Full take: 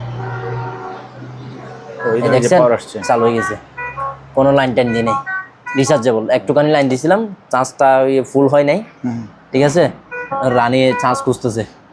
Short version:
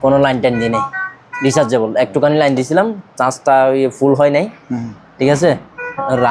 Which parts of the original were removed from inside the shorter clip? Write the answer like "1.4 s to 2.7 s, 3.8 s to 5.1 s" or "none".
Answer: none